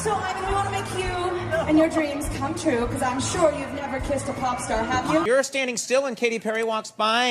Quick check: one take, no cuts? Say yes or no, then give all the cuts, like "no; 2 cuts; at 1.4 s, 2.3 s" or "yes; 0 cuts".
no; 1 cut; at 5.2 s